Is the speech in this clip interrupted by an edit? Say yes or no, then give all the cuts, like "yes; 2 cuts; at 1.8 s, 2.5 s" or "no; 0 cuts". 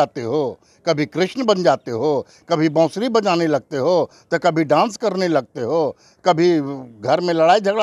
no; 0 cuts